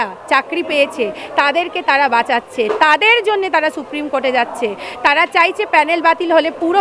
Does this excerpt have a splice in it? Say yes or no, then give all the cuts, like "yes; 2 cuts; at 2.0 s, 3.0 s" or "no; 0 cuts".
no; 0 cuts